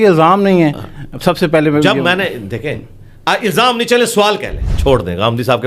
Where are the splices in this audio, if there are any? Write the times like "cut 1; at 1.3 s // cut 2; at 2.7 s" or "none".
cut 1; at 4.7 s